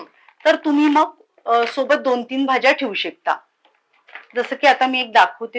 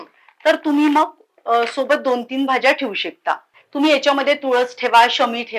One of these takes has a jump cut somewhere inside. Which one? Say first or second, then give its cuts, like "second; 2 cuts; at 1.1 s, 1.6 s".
second; 1 cut; at 3.5 s